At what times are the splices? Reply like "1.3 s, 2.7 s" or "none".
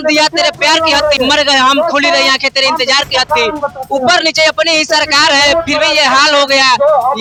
none